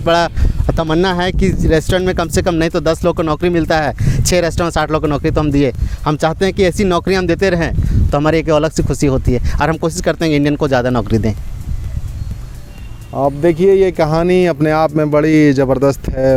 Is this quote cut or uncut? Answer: uncut